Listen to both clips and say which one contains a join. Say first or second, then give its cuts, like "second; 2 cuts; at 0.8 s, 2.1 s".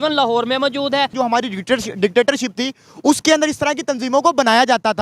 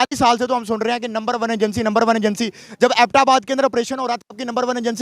first; 1 cut; at 1.1 s